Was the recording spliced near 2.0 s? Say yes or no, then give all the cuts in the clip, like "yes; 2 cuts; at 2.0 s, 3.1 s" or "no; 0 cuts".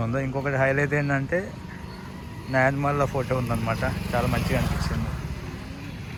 no; 0 cuts